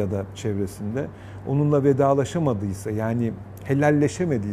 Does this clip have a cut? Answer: no; 0 cuts

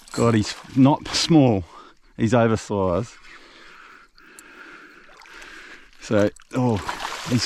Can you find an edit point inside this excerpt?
no; 0 cuts

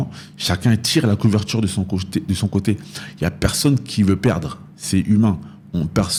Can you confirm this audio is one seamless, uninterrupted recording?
yes; 0 cuts

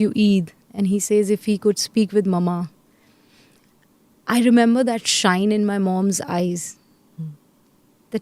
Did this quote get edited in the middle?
no; 0 cuts

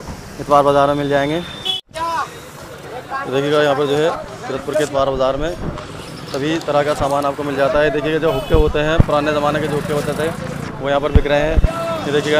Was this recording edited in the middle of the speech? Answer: no; 0 cuts

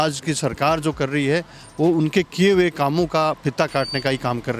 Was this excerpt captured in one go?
yes; 0 cuts

